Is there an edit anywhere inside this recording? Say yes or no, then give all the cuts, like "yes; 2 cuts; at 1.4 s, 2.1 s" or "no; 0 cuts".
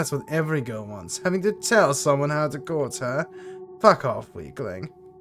no; 0 cuts